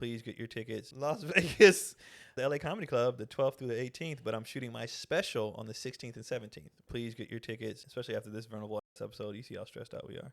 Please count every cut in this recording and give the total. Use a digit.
4